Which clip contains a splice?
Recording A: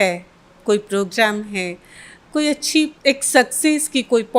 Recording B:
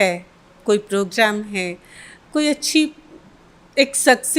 A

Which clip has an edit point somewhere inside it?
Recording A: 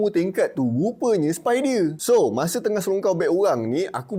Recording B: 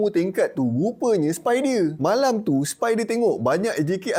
A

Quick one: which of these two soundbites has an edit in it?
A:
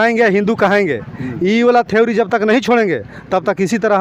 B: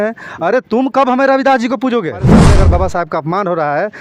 B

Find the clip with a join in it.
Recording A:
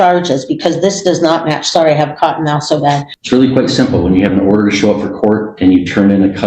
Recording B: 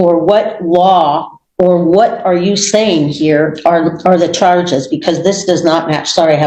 A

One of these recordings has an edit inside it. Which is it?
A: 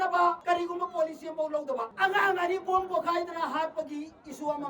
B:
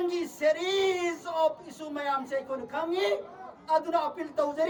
A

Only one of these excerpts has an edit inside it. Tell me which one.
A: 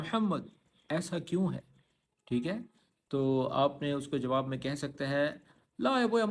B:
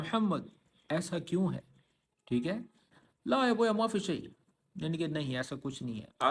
B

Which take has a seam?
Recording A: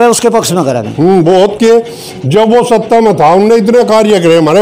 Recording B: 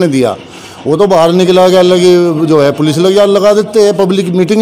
A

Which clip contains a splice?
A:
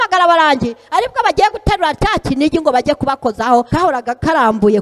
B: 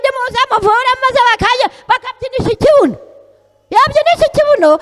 A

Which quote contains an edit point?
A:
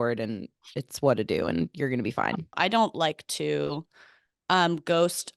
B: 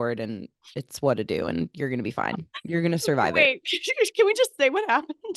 A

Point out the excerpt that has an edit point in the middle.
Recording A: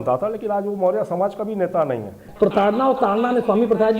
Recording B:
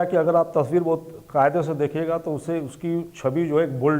A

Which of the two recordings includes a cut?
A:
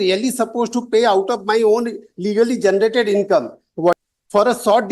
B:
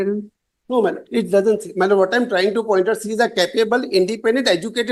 A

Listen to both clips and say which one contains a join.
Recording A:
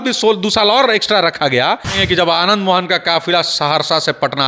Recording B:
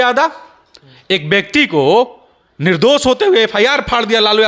A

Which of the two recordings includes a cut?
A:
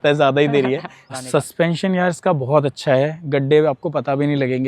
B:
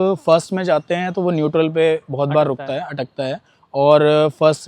A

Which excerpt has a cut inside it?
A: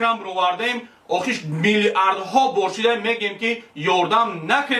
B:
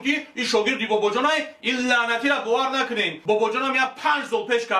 B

